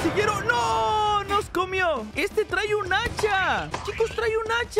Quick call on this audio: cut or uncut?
cut